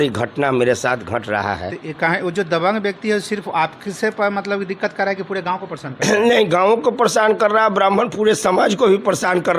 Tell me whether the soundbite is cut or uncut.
uncut